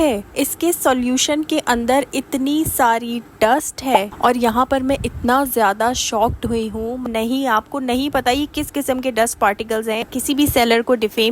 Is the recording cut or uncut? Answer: cut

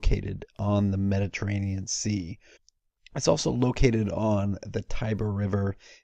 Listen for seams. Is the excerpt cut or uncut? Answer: cut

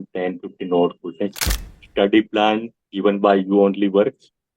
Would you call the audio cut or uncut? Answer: cut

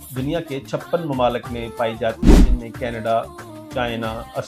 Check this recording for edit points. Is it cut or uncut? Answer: uncut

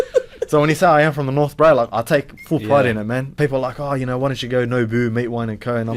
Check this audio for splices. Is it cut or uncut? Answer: cut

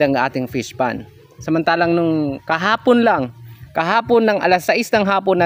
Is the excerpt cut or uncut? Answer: uncut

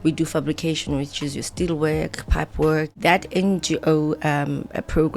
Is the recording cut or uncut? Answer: cut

